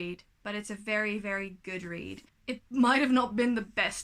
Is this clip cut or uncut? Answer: cut